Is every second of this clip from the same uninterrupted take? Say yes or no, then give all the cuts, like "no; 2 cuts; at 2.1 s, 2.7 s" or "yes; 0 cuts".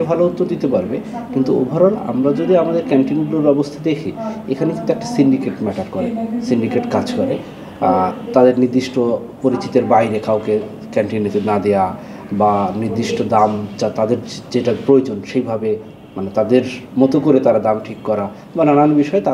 yes; 0 cuts